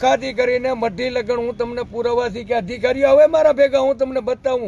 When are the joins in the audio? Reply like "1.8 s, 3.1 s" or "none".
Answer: none